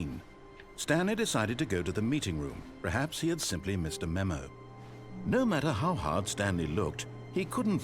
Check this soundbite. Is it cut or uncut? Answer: cut